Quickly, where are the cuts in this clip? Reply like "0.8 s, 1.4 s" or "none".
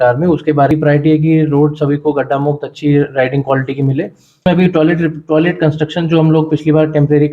0.7 s, 4.5 s